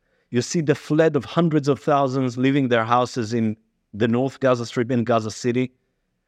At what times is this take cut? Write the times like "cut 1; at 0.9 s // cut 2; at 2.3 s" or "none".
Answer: none